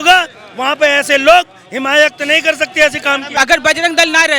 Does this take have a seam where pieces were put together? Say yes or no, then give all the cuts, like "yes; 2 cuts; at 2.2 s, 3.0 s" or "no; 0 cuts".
yes; 1 cut; at 3.3 s